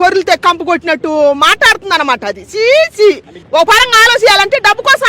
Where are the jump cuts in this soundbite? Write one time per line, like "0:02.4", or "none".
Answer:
0:03.3